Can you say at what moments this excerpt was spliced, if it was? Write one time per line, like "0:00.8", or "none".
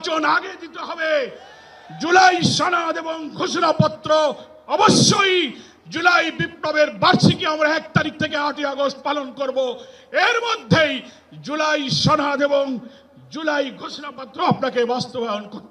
none